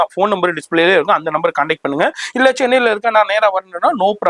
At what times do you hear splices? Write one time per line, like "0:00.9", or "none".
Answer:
none